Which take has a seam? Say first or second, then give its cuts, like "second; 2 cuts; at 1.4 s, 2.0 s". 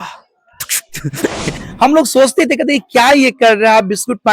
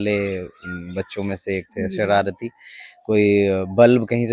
first; 1 cut; at 1.6 s